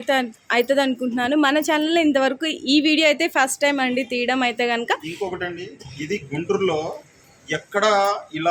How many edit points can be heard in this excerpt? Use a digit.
0